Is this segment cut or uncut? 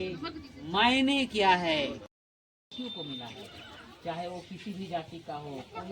cut